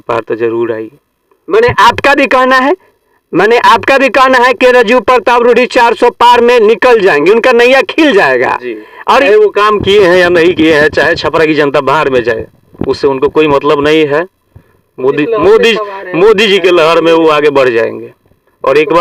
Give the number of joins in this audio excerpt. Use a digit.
0